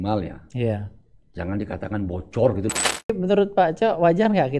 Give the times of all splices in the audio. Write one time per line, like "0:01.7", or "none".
0:03.1